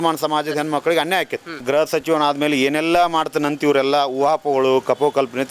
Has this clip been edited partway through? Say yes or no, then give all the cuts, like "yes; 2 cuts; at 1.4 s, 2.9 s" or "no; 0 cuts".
yes; 1 cut; at 1.6 s